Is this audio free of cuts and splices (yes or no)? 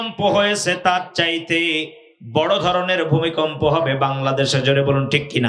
yes